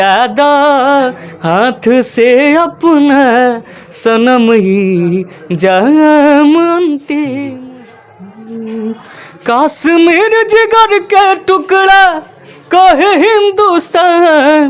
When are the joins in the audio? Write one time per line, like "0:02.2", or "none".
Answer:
0:07.5